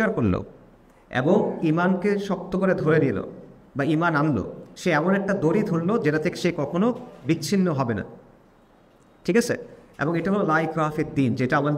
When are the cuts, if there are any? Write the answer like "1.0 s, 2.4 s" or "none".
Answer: none

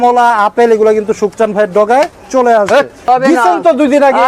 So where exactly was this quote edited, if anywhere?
3.1 s

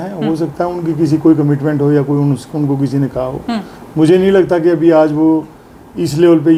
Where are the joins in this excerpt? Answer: none

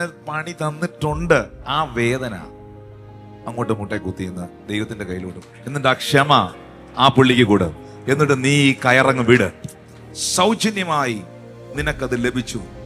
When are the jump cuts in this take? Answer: none

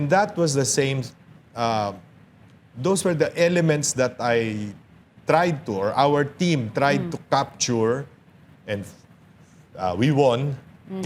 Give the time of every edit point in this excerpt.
none

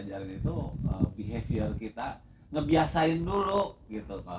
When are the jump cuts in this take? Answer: none

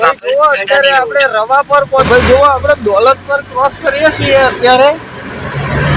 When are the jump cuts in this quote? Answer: 2.0 s

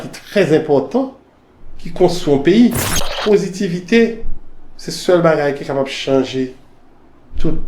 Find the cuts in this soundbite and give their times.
2.9 s

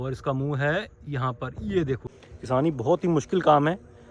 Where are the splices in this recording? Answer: 2.1 s

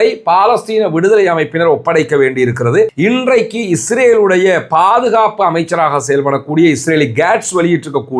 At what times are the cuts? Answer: 2.9 s

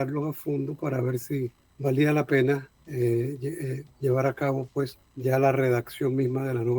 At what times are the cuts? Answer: 1.6 s, 2.8 s, 5.0 s

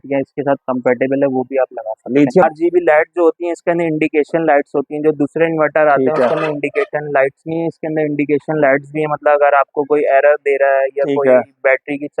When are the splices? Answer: 2.4 s

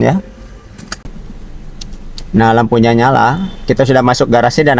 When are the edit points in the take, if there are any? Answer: 1.4 s

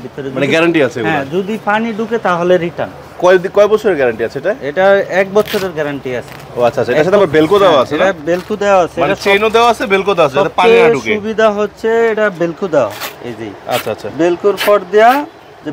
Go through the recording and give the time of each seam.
none

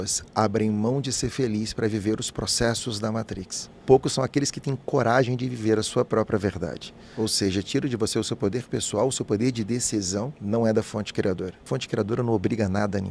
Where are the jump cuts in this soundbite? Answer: 3.7 s, 7.0 s, 11.6 s

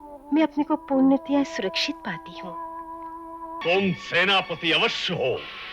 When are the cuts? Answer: 3.5 s

